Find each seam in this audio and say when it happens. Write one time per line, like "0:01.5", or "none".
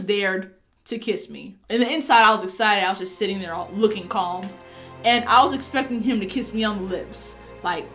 none

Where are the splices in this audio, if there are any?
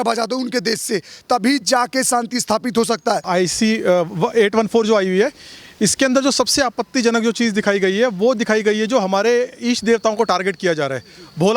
0:03.3

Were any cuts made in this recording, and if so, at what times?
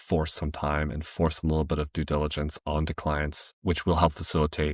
none

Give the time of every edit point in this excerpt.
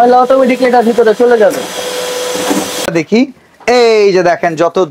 0:02.9

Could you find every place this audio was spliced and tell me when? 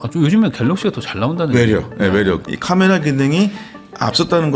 0:02.4

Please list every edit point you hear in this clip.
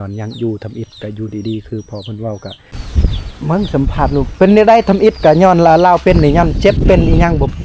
0:02.8

